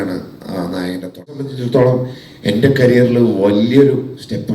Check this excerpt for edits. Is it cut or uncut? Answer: cut